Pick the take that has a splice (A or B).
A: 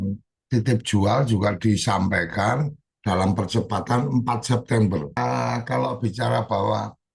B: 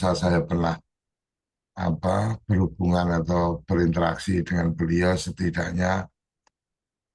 A